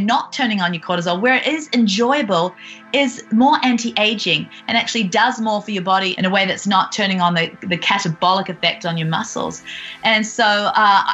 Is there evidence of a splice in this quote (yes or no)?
yes